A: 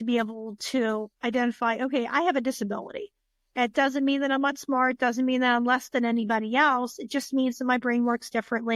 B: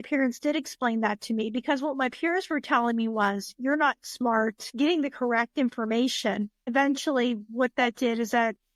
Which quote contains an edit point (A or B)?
B